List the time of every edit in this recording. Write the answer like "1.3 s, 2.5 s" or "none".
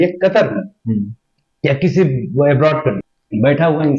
3.0 s